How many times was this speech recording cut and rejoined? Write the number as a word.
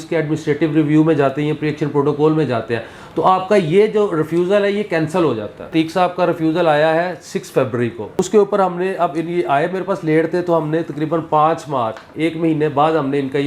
two